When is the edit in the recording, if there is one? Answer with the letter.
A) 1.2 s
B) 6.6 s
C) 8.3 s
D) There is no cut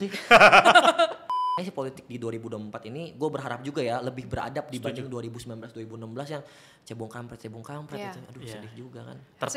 A